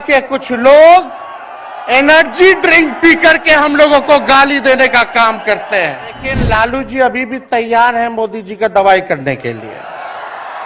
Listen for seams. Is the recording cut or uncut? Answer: cut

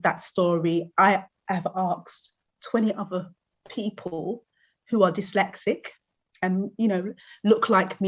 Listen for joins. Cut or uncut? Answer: uncut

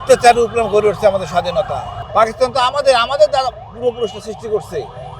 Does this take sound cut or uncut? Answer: cut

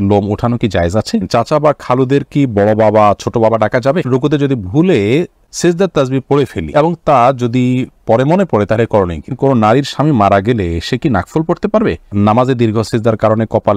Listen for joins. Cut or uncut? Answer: cut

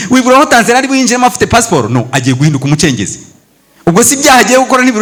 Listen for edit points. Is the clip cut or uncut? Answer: uncut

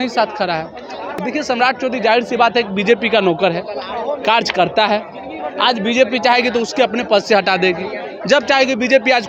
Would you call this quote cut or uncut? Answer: cut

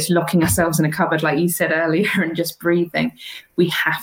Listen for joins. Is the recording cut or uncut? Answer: uncut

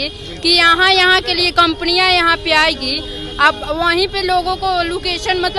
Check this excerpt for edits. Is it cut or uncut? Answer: uncut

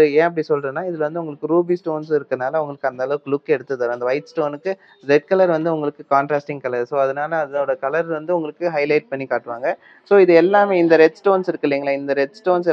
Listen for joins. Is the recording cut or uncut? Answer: uncut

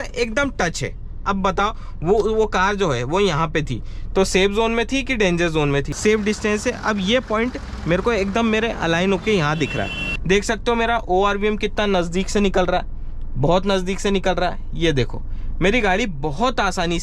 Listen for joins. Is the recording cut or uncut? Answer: cut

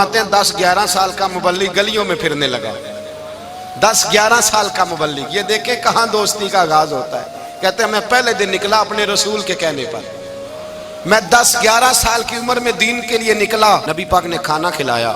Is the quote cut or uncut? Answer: cut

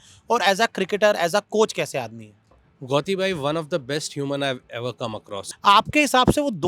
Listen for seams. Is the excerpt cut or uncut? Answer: cut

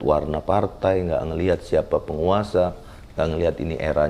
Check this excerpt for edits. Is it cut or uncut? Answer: uncut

